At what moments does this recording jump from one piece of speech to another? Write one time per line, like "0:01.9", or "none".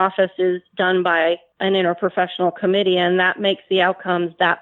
0:01.5

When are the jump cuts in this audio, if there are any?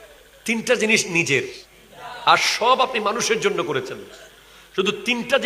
none

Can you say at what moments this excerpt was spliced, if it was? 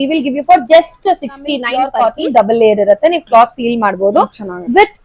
0:01.7

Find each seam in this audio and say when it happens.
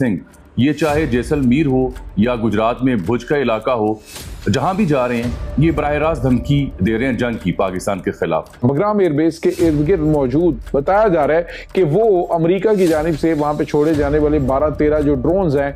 0:08.6

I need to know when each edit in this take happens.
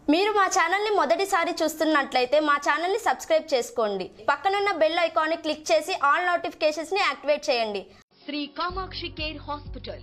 0:04.2
0:08.1

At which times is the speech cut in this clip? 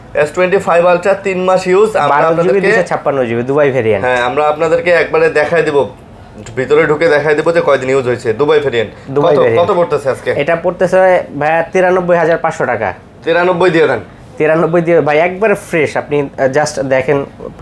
none

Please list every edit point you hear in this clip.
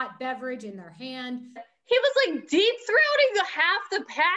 0:01.7

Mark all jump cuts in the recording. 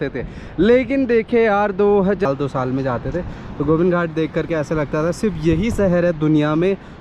0:02.3

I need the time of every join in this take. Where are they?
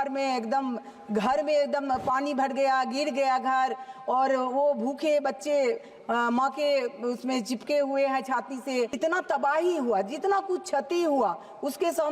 0:08.9

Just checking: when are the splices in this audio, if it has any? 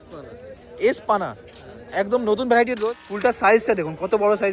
0:02.8

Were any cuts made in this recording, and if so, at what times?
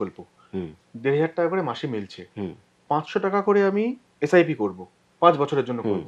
none

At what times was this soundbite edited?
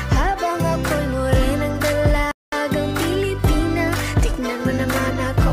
none

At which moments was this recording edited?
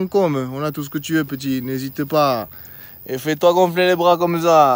none

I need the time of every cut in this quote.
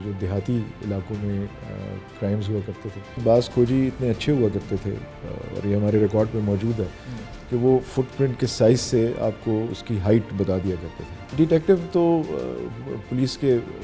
0:03.2
0:11.3

